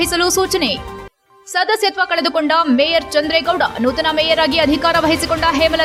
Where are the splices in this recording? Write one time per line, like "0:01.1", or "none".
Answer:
none